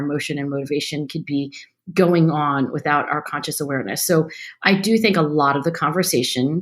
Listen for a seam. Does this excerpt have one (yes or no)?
no